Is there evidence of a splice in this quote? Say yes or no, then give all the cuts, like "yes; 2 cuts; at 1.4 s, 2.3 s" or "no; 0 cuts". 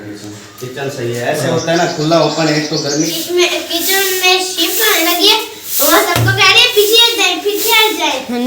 yes; 1 cut; at 3.2 s